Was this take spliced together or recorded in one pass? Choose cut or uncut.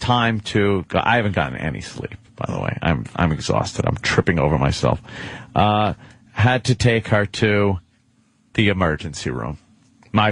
uncut